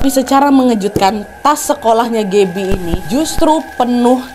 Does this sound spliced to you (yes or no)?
no